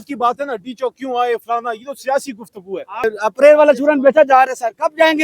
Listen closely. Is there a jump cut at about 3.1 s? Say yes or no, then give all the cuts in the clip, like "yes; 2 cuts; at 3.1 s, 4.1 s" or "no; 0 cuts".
yes; 1 cut; at 3.1 s